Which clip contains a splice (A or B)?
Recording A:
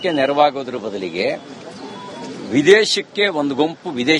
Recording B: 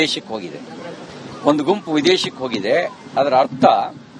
B